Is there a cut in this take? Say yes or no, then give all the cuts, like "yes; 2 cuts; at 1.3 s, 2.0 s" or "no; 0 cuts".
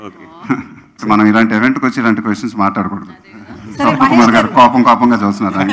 yes; 1 cut; at 1.0 s